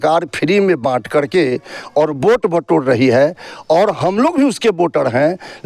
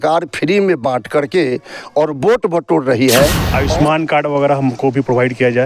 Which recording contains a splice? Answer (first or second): second